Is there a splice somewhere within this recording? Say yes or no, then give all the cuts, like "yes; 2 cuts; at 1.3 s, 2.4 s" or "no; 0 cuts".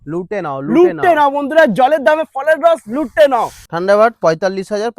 yes; 1 cut; at 3.7 s